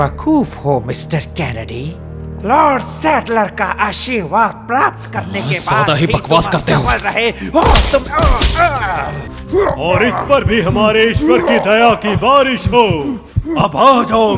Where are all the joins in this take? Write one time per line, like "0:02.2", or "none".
0:09.2